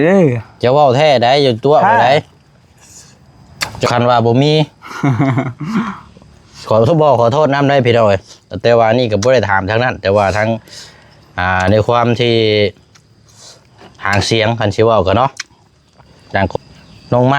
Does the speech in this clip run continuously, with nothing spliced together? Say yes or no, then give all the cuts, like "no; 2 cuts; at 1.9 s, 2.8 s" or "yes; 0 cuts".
no; 2 cuts; at 3.9 s, 16.6 s